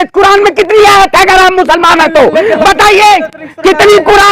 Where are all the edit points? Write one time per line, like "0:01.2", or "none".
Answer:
none